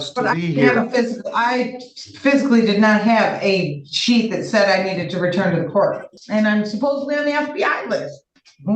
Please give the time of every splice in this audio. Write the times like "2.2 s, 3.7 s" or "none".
6.1 s